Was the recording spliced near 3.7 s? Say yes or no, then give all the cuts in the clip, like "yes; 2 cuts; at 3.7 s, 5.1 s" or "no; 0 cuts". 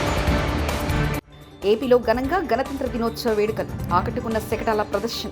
no; 1 cut; at 1.3 s